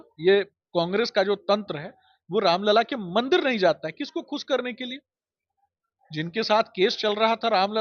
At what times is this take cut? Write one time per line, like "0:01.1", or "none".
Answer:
none